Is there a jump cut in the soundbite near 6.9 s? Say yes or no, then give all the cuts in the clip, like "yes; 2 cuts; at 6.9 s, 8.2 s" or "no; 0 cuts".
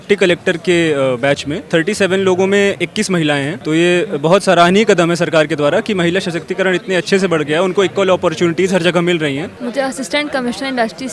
no; 3 cuts; at 1.5 s, 3.5 s, 9.4 s